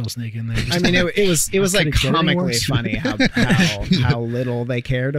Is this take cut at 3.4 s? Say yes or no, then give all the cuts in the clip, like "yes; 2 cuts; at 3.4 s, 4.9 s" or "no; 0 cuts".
no; 0 cuts